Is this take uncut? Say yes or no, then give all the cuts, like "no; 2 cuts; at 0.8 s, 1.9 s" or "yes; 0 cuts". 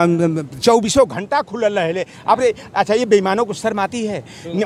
yes; 0 cuts